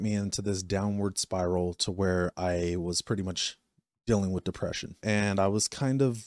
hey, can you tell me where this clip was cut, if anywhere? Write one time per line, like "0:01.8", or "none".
0:05.0

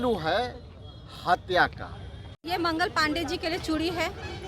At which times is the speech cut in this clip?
0:02.3

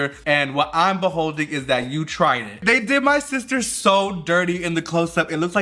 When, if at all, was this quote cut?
0:02.6

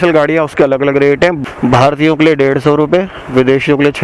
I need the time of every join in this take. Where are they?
0:01.4

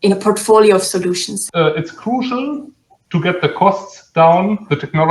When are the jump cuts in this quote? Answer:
0:01.3

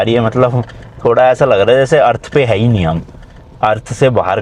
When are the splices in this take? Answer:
none

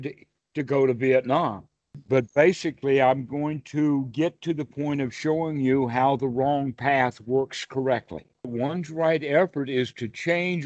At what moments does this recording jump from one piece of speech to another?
0:02.0
0:08.5

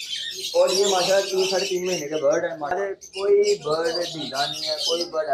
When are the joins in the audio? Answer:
0:02.8

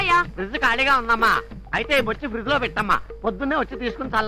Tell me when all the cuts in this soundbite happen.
none

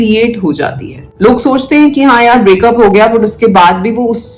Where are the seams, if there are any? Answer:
0:01.0

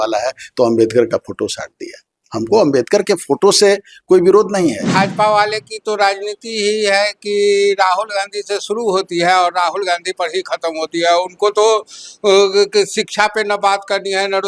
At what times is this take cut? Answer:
0:04.8

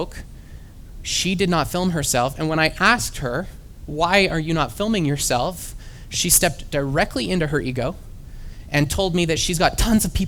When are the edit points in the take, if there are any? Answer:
none

